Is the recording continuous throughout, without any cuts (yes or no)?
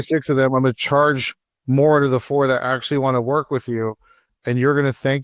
yes